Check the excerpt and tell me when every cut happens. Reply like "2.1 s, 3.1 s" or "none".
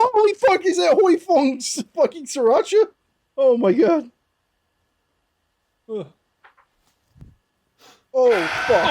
none

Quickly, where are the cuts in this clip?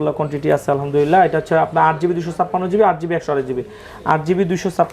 none

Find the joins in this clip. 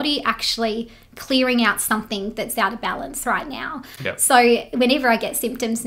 none

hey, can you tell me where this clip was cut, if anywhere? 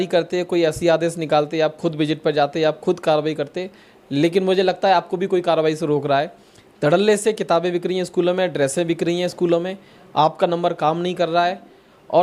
none

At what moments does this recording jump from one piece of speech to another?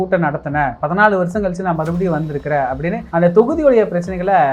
none

